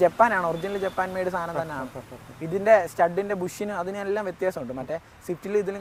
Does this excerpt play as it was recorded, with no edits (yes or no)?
yes